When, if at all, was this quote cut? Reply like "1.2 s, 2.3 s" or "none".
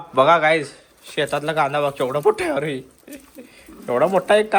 none